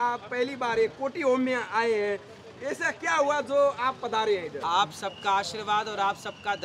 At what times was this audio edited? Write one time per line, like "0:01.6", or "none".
none